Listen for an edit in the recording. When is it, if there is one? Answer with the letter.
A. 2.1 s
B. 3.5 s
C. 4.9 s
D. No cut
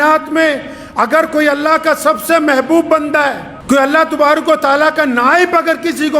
B